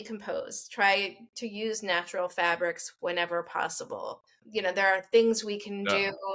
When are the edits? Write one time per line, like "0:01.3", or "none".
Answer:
0:04.3